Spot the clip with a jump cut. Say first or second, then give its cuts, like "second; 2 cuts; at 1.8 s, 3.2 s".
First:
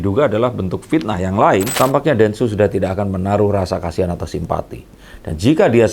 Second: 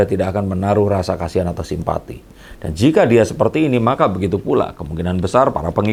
first; 1 cut; at 1.7 s